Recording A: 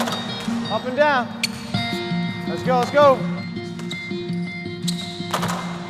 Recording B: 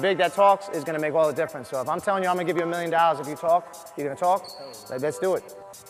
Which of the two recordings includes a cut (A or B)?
B